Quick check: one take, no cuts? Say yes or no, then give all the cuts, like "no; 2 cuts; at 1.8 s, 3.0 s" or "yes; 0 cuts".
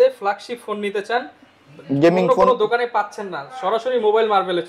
yes; 0 cuts